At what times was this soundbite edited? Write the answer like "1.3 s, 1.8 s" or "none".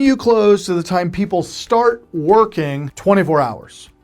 2.8 s